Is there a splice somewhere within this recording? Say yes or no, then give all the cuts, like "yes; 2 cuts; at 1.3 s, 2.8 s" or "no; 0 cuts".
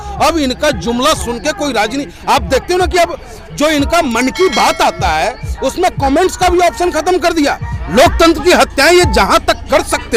no; 0 cuts